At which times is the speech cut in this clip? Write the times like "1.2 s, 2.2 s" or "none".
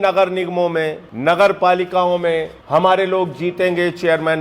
1.1 s, 2.6 s

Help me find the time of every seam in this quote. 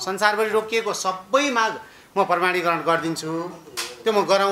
none

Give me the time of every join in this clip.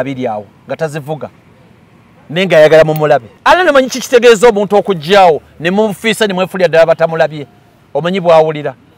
3.3 s

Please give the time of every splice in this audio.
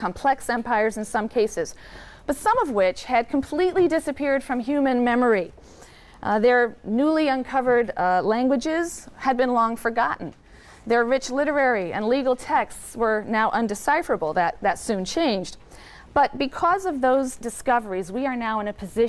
none

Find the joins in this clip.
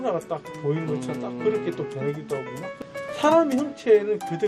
2.7 s

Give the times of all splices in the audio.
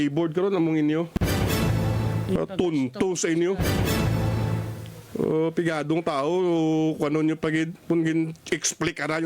1.1 s

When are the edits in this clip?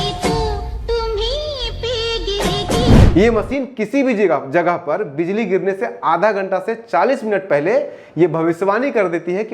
3.0 s

